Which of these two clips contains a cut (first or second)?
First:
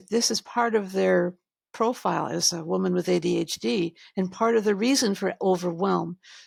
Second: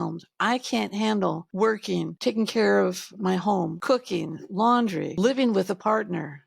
second